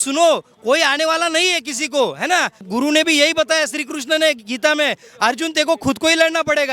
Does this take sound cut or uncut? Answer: cut